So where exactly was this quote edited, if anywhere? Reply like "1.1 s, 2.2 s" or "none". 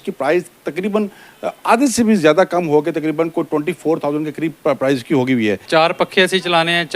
5.6 s